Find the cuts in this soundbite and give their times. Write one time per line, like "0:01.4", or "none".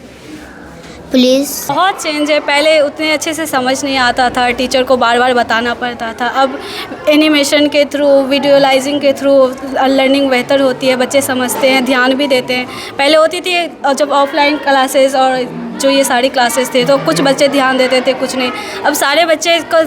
0:01.7

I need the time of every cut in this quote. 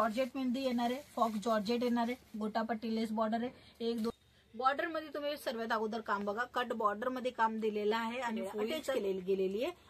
0:04.1
0:08.9

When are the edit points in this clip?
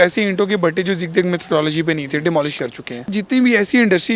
0:03.1

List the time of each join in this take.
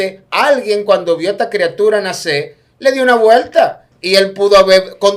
none

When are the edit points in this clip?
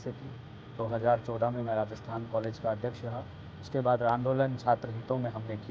0:04.1

